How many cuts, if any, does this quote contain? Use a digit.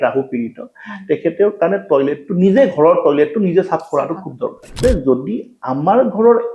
1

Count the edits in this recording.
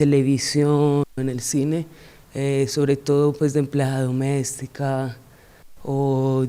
0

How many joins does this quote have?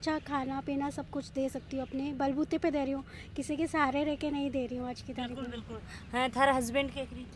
0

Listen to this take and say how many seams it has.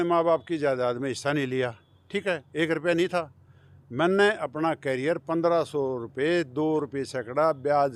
0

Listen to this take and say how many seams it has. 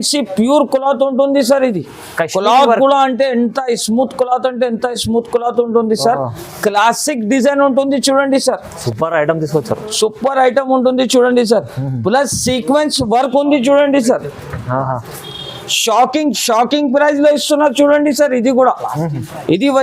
1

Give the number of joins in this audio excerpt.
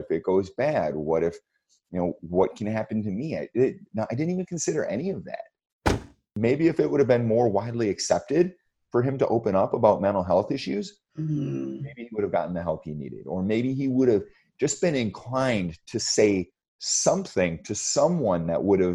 1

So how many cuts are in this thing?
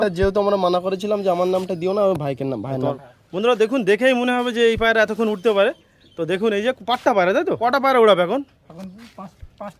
2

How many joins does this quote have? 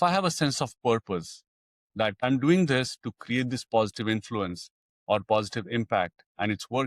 1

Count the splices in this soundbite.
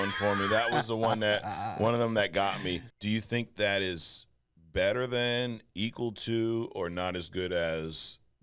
1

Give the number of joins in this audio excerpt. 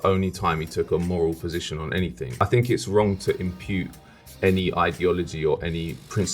1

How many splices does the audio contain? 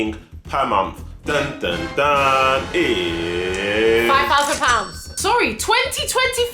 1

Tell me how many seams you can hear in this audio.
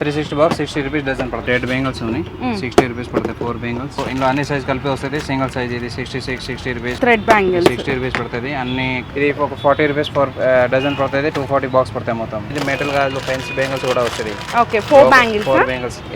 5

